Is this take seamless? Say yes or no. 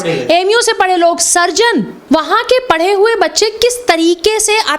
no